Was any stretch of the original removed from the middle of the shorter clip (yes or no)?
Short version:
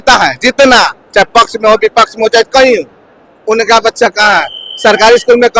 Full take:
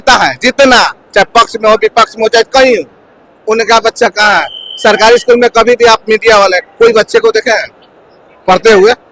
no